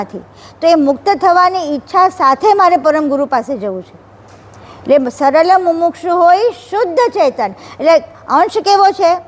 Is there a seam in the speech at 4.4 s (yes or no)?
no